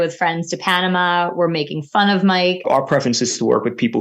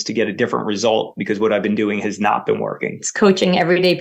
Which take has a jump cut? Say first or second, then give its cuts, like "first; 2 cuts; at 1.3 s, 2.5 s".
first; 1 cut; at 2.6 s